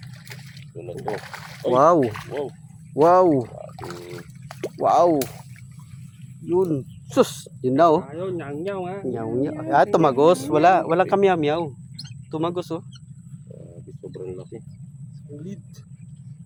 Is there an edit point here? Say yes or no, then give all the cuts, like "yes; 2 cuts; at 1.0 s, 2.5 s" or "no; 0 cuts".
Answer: no; 0 cuts